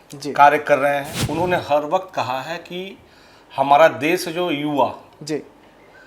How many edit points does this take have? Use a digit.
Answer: 1